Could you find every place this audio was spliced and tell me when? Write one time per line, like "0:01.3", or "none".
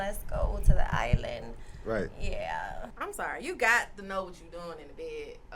0:02.9